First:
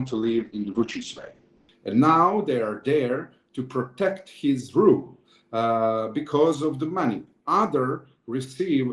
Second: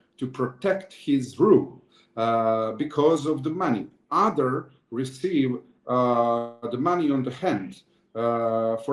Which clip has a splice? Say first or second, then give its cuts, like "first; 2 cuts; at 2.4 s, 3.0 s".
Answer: first; 1 cut; at 1.6 s